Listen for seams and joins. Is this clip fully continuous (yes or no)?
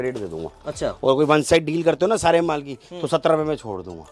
yes